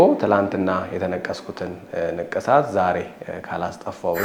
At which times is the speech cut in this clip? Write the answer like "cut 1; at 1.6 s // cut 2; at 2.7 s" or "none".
none